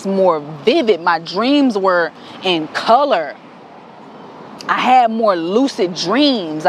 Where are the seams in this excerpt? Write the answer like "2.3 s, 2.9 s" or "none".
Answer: none